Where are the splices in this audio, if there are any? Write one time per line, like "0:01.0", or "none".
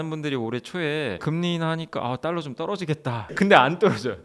0:01.2
0:03.3